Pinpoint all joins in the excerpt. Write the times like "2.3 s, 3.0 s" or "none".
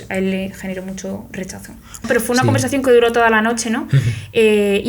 2.1 s